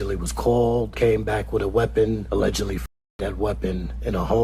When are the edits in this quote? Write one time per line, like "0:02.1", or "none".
0:00.9
0:02.2